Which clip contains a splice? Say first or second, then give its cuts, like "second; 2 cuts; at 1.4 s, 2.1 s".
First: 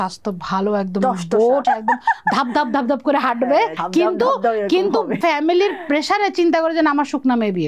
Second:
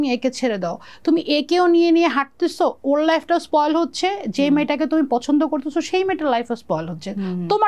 first; 3 cuts; at 1.6 s, 3.8 s, 5.2 s